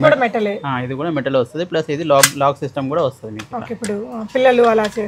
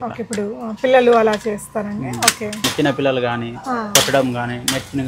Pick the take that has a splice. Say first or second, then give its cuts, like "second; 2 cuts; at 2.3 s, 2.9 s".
second; 1 cut; at 2.7 s